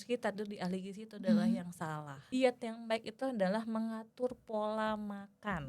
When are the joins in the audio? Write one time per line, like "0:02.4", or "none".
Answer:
0:02.1

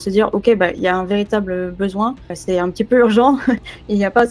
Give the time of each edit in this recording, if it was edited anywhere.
0:02.3

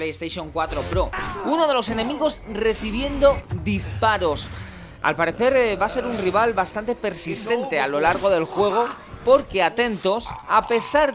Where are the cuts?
0:01.2

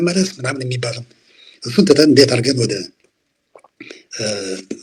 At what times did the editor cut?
none

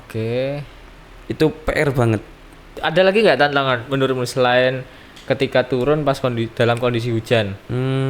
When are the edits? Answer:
0:02.8

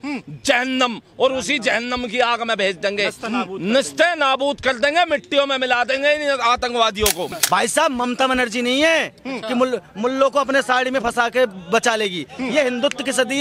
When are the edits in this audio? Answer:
0:07.3

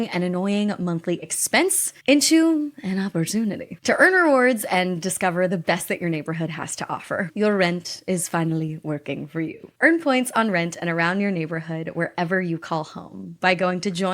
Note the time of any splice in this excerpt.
0:03.7
0:07.3

